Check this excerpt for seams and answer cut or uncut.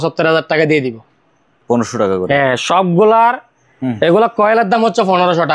uncut